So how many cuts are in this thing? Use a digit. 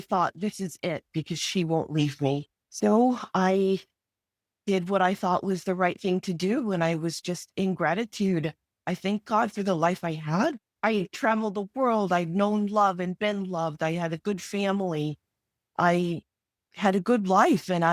0